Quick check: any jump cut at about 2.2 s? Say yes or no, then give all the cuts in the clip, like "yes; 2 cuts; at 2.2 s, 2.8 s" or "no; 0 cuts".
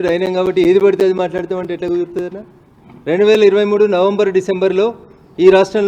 no; 0 cuts